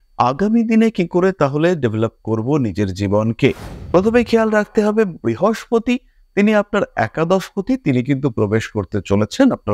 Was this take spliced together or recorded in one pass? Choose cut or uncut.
cut